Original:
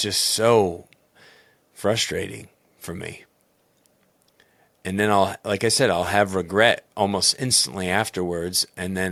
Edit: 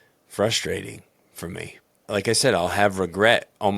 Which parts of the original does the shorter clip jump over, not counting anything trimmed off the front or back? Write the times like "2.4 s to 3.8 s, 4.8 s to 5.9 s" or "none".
3.5 s to 5.4 s